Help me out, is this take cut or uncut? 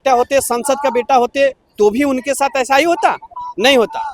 uncut